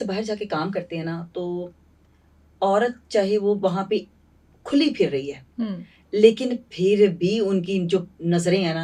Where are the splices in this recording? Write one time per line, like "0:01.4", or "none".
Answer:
none